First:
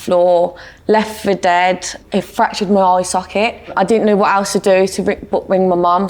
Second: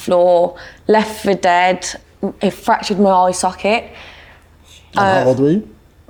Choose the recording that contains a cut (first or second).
first